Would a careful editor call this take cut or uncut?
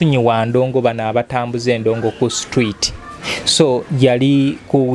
uncut